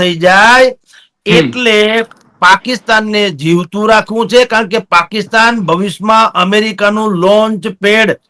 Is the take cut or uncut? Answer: uncut